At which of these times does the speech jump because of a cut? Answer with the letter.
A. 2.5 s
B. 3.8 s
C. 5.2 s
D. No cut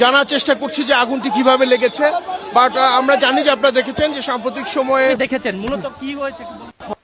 C